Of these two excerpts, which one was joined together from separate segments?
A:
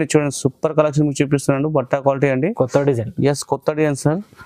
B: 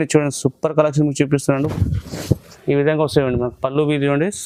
B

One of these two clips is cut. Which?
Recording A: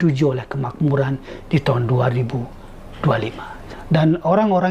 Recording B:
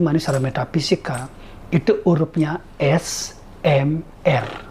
A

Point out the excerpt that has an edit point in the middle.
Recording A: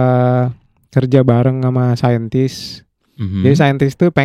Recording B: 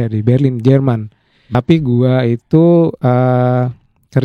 B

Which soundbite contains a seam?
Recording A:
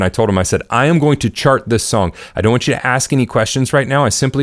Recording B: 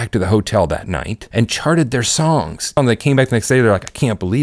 B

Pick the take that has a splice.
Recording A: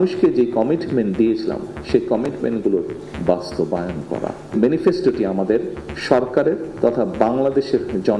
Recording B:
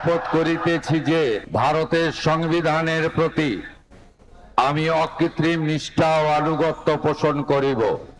A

